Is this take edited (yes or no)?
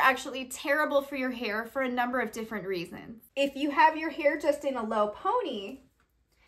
yes